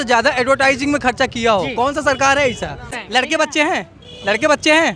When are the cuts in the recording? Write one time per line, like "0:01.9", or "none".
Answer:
0:03.0